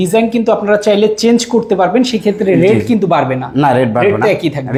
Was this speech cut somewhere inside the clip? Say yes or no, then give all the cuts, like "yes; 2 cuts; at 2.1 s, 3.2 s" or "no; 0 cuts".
no; 0 cuts